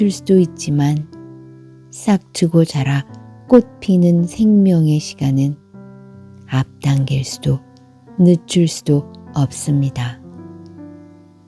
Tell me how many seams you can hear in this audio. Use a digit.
0